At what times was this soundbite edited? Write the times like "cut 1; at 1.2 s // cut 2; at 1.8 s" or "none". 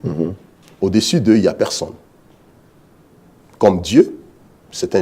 none